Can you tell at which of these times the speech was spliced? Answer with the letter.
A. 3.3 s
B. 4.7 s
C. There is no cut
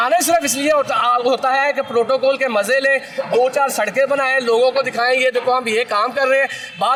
C